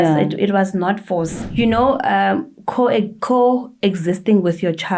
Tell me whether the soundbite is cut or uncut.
cut